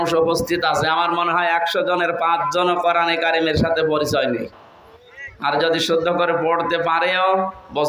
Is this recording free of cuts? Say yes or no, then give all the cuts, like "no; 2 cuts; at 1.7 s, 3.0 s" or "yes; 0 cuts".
yes; 0 cuts